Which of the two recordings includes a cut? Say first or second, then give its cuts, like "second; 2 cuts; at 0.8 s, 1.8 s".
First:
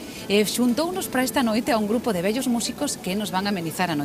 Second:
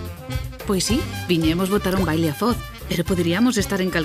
first; 1 cut; at 2.8 s